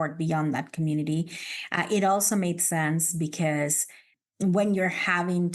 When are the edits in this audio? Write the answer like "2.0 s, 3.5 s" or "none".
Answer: 4.1 s